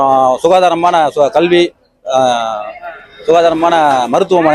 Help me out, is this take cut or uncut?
uncut